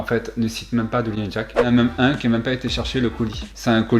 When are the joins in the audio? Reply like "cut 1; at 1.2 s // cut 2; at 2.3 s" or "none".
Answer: cut 1; at 1.7 s